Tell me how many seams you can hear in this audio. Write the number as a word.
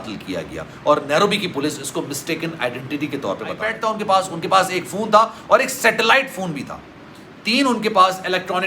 one